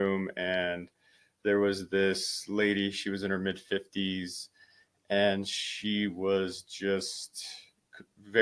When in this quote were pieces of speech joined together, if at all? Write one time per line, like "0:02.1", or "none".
none